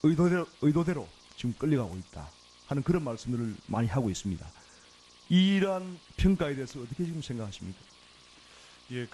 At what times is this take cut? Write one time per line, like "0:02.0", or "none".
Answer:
0:07.5